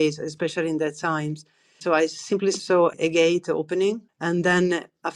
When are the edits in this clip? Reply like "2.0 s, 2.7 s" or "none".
2.8 s, 4.1 s

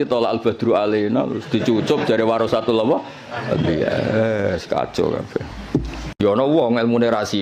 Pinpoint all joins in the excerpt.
6.1 s

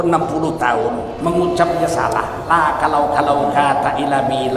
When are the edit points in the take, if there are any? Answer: none

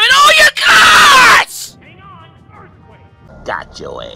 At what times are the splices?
3.2 s

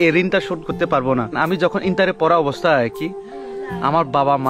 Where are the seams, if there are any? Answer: 1.3 s

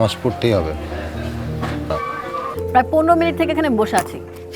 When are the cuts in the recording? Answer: 1.9 s

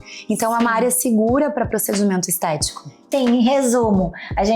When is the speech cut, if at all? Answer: 3.1 s

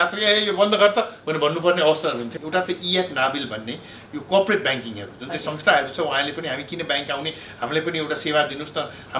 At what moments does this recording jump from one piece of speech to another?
2.3 s

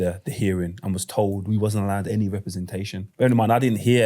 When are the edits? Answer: 3.0 s

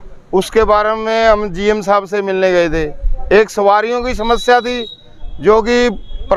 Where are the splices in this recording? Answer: none

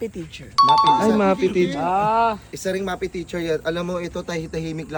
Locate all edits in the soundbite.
none

